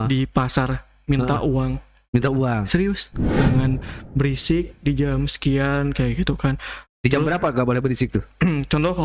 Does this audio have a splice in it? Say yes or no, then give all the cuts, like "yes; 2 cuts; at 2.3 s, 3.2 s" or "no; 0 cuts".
yes; 1 cut; at 3.4 s